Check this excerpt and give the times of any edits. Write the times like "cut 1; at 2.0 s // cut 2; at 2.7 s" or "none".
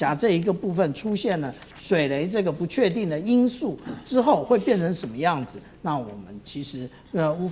none